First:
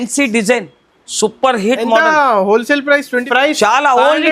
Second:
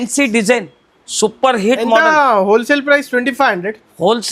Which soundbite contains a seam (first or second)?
first